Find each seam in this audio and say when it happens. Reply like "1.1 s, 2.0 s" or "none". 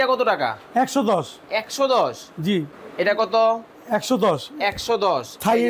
2.8 s